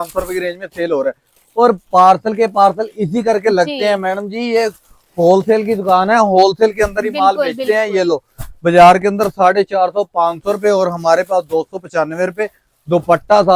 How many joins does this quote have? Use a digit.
0